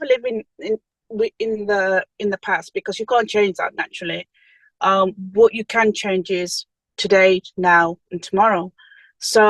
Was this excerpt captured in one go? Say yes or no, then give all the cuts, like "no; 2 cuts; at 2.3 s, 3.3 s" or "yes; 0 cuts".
yes; 0 cuts